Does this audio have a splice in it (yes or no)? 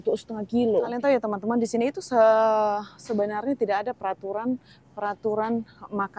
yes